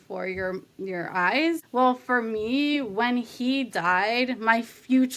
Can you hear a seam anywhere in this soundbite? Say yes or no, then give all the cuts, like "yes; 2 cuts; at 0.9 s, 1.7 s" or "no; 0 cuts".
yes; 1 cut; at 1.6 s